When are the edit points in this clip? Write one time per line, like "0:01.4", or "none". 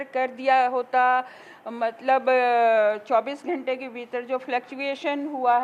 none